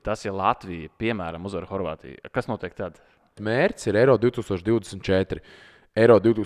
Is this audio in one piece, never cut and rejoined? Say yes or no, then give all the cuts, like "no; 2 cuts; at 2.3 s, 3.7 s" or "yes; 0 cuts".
no; 1 cut; at 3.4 s